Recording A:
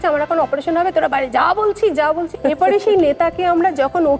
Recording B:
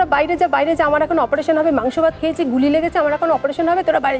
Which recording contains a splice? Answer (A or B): A